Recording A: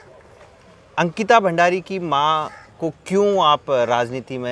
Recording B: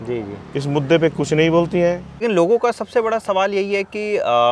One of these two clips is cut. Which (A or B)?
B